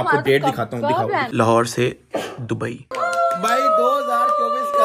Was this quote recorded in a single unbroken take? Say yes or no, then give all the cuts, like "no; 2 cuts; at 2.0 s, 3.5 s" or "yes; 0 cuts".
no; 2 cuts; at 1.3 s, 2.9 s